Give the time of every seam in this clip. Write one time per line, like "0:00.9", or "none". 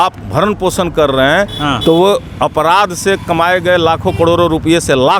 none